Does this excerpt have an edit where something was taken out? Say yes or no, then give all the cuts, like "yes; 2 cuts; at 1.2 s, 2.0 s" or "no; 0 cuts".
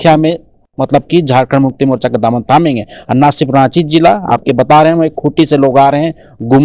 no; 0 cuts